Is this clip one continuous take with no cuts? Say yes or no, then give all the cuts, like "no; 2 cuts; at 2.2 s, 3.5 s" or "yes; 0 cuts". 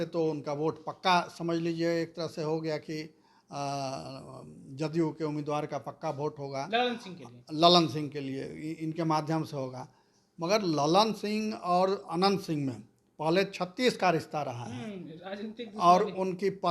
yes; 0 cuts